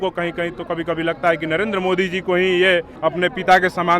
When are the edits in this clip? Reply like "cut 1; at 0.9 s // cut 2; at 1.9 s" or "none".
cut 1; at 2.9 s